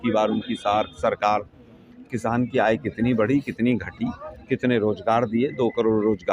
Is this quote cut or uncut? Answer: uncut